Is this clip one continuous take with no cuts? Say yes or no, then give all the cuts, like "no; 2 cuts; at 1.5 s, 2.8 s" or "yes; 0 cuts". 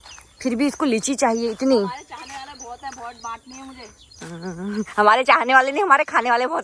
yes; 0 cuts